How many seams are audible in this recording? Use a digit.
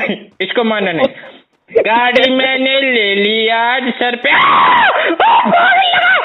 0